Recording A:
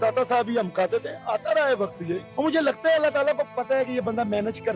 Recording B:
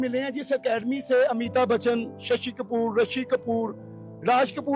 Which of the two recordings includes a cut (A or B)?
A